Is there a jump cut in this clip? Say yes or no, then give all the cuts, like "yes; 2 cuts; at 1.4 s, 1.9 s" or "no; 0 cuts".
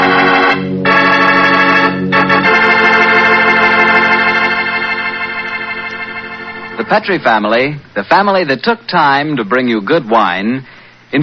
no; 0 cuts